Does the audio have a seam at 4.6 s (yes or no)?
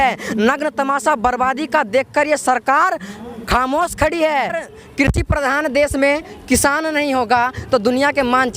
yes